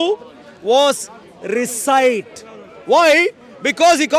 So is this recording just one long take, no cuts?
yes; 0 cuts

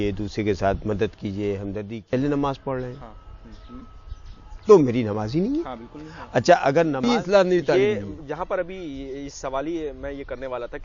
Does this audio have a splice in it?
yes; 2 cuts; at 2.1 s, 7.0 s

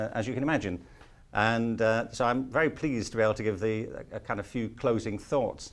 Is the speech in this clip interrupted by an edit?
yes; 1 cut; at 1.2 s

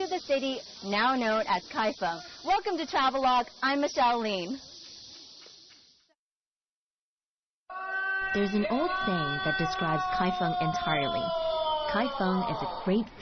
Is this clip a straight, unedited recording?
yes; 0 cuts

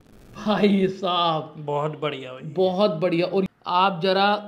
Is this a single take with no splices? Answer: no; 1 cut; at 3.5 s

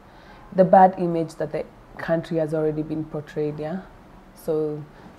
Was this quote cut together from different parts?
no; 0 cuts

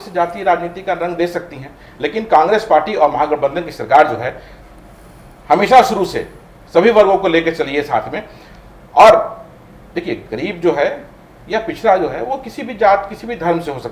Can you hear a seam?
no; 0 cuts

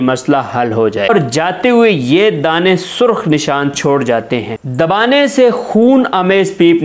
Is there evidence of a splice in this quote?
yes; 2 cuts; at 1.1 s, 4.6 s

